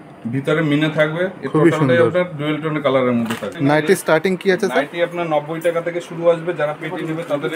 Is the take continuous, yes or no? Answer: no